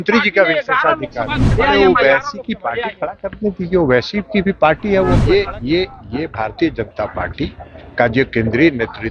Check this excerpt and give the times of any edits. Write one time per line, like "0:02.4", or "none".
0:01.4
0:05.2